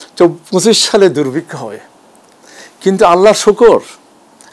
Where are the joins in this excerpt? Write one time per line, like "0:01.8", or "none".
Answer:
none